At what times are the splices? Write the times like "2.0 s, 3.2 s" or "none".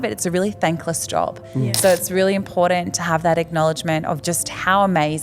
none